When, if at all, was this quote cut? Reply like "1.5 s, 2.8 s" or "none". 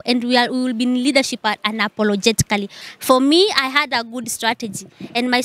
2.8 s